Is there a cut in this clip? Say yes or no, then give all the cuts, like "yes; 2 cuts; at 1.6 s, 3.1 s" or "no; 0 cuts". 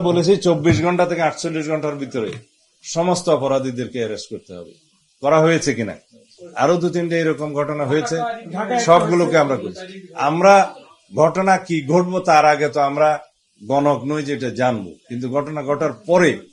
no; 0 cuts